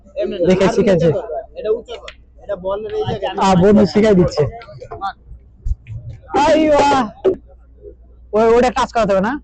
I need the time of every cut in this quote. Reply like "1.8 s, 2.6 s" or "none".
7.4 s